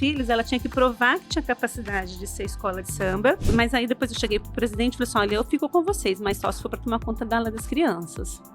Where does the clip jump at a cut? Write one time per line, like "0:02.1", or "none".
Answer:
0:03.5